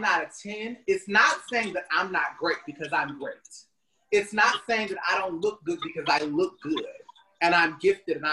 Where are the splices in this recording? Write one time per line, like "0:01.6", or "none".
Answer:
none